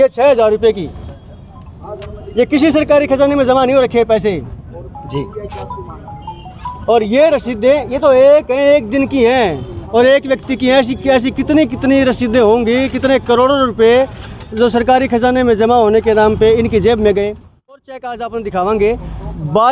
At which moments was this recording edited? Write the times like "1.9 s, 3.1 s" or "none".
17.9 s